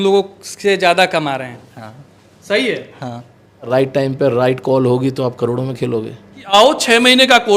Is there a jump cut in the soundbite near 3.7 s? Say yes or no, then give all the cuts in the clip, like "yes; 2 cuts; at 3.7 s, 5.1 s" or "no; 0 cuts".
yes; 2 cuts; at 3.7 s, 6.5 s